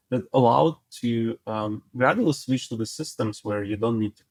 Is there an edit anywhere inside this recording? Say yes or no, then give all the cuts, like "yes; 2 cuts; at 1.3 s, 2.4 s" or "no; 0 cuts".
no; 0 cuts